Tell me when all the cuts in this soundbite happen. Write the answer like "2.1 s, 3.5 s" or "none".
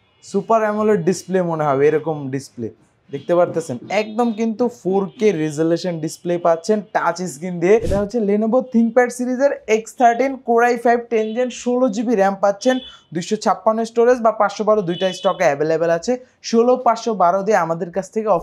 7.9 s